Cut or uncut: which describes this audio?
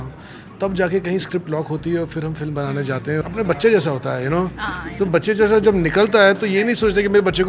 cut